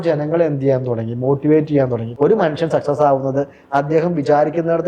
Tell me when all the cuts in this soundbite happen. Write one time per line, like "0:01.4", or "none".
0:02.0